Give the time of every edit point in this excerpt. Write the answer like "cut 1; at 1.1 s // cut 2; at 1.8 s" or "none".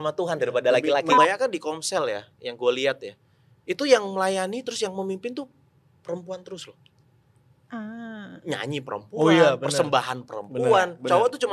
cut 1; at 1.2 s